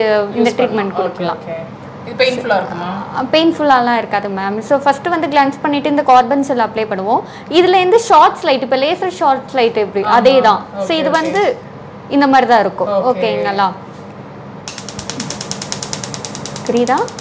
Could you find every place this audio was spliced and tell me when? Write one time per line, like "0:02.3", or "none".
none